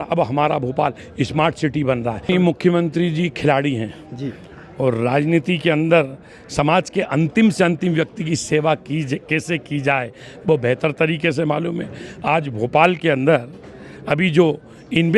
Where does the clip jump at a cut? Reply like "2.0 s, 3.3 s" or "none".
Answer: 2.3 s